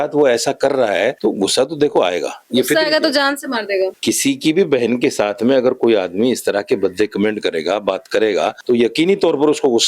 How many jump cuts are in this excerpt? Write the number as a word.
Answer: three